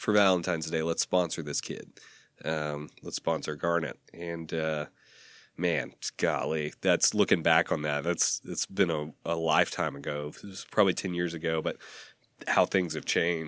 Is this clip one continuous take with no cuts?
yes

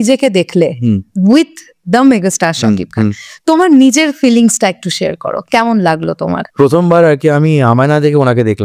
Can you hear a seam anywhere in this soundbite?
no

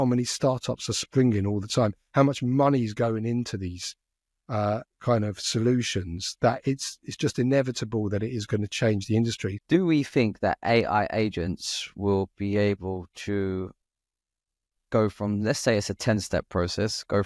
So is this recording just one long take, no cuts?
no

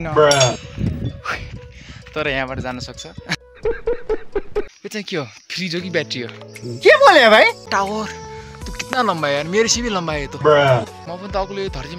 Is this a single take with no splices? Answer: no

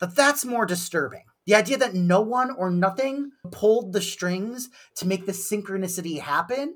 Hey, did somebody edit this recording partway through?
no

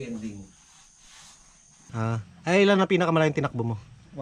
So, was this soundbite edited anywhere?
yes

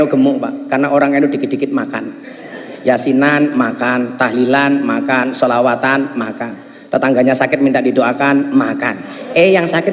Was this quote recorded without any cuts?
yes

